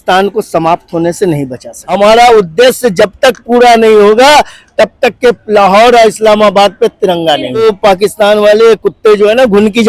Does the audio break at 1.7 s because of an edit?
yes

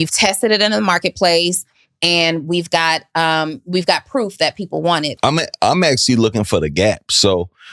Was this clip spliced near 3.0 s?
no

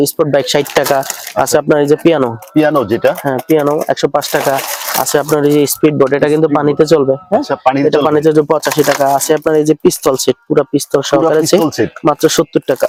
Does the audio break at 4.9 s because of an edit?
no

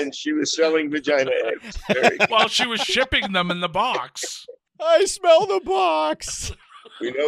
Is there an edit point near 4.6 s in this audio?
no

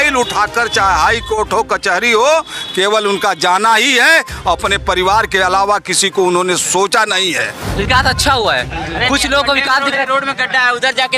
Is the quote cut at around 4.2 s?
no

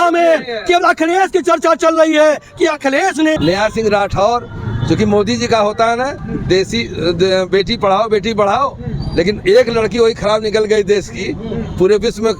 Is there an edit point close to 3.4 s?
yes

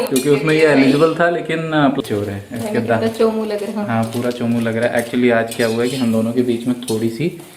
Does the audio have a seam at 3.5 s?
no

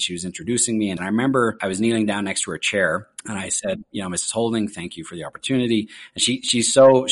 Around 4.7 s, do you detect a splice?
no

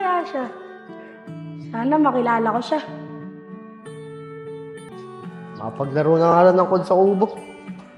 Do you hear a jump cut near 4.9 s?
yes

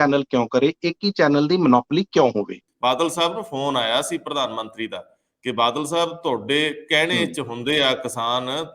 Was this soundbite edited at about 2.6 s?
yes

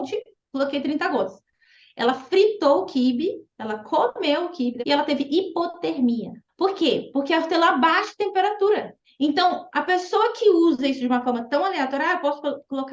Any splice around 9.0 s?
yes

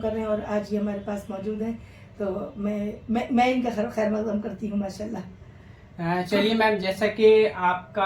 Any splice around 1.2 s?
no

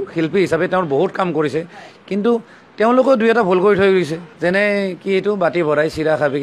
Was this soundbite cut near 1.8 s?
no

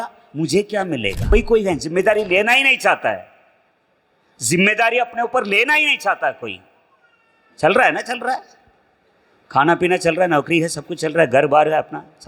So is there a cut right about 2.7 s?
no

